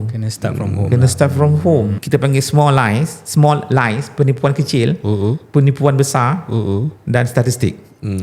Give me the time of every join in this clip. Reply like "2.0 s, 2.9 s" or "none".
2.0 s